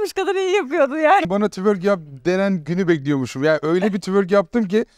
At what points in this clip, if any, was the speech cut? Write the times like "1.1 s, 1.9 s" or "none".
1.3 s